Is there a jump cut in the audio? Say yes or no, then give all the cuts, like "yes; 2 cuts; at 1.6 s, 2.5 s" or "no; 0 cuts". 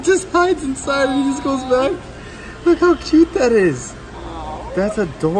no; 0 cuts